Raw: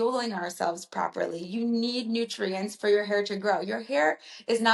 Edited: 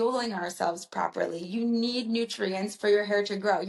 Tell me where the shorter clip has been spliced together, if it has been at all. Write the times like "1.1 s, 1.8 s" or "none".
none